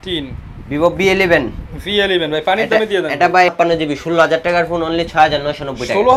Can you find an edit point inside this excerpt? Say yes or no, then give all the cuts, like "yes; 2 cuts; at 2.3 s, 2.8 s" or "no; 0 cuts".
yes; 1 cut; at 3.5 s